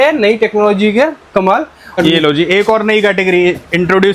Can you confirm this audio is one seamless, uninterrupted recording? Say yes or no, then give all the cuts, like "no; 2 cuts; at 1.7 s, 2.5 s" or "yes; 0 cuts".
no; 1 cut; at 2.0 s